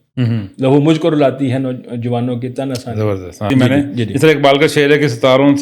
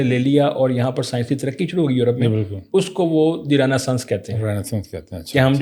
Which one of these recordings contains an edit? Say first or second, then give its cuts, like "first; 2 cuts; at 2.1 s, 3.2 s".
first; 1 cut; at 3.5 s